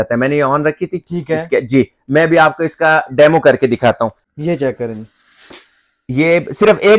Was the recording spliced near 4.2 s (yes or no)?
yes